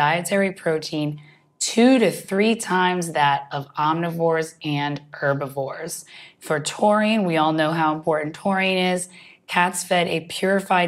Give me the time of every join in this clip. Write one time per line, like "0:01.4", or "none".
none